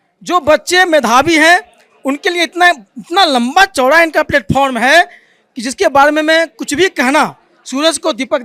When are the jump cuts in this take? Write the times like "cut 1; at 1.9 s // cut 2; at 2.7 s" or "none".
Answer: none